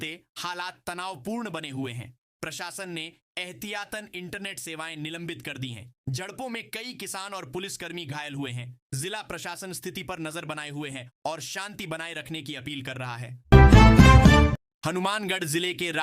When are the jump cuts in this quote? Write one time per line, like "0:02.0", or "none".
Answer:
0:13.3
0:14.7